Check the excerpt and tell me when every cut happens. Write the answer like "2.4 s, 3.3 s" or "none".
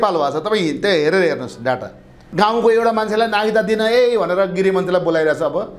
2.2 s